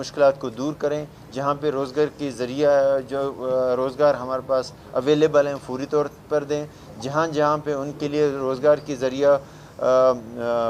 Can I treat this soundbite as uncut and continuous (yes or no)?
yes